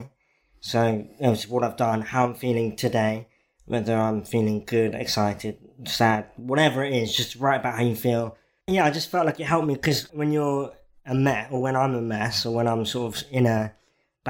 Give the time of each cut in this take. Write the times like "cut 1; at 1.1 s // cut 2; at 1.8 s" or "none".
cut 1; at 8.6 s // cut 2; at 10.1 s